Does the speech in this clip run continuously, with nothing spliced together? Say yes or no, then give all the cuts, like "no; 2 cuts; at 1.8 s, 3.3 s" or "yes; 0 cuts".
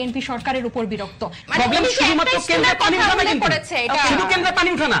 no; 1 cut; at 1.4 s